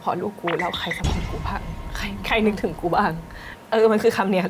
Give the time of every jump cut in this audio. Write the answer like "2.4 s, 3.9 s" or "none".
none